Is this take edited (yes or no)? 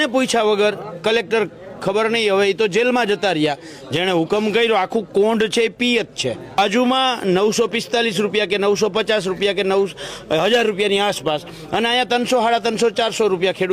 yes